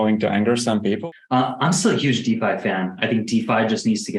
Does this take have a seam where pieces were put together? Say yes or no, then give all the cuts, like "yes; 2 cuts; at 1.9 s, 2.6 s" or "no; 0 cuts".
yes; 1 cut; at 1.0 s